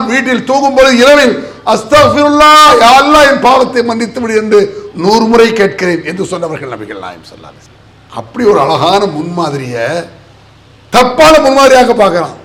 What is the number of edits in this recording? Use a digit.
0